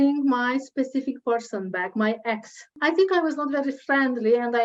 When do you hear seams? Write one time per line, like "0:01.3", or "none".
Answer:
0:02.8